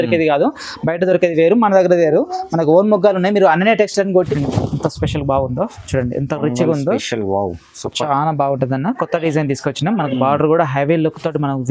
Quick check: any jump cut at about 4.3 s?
yes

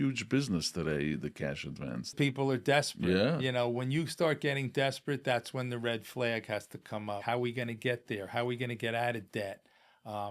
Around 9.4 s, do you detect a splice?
no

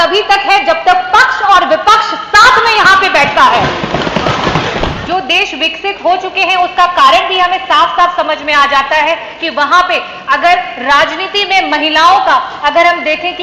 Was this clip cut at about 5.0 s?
yes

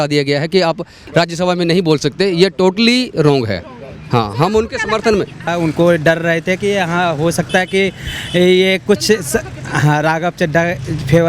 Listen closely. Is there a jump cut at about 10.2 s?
no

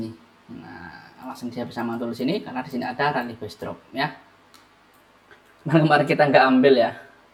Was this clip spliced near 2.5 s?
no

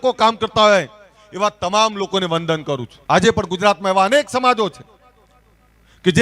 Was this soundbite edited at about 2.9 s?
yes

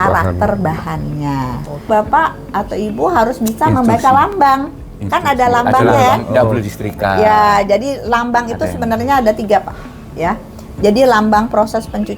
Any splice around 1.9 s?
yes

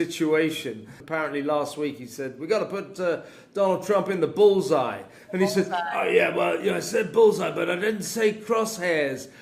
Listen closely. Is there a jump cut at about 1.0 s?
yes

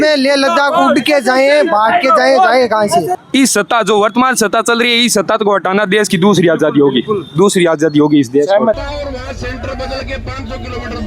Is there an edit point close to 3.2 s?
yes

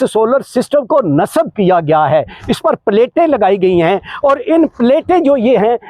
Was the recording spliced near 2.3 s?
no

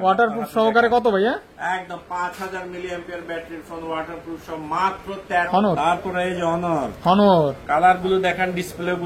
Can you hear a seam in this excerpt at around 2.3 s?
no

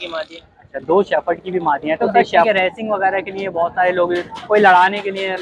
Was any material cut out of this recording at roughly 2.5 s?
yes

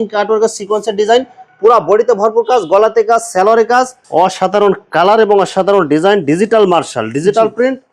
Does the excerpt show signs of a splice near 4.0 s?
yes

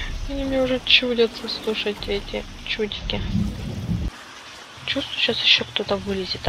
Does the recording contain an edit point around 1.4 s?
no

